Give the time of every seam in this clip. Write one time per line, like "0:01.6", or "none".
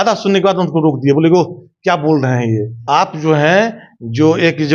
0:02.7